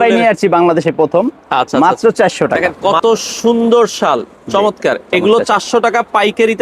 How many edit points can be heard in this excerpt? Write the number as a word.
one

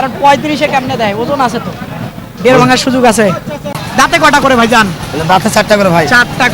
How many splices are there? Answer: one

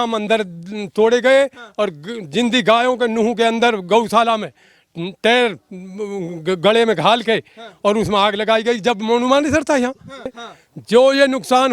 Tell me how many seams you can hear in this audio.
one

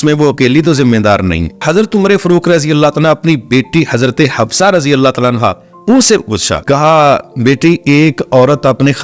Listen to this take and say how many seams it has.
two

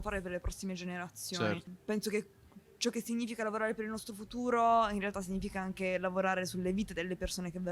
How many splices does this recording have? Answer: one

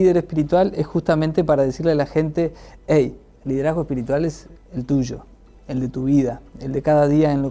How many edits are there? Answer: one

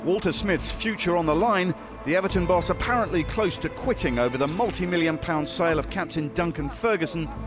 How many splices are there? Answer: zero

